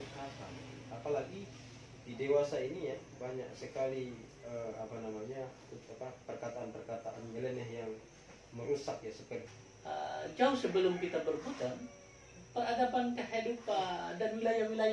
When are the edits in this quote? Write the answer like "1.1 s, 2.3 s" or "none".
9.5 s